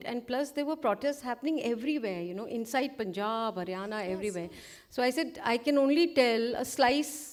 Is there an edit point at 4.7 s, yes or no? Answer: no